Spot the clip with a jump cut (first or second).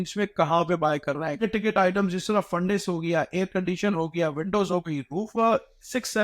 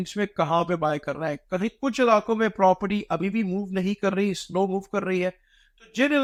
first